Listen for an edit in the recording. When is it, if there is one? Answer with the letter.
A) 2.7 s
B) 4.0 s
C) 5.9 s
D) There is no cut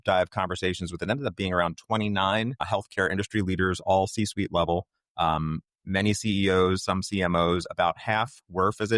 A